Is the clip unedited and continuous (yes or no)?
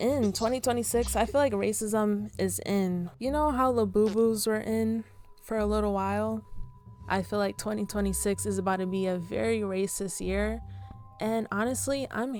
yes